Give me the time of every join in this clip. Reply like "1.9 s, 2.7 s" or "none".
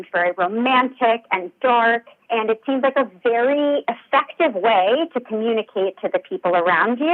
none